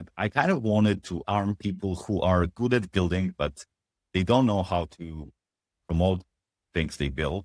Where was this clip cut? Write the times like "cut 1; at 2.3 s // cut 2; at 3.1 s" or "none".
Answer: cut 1; at 1.2 s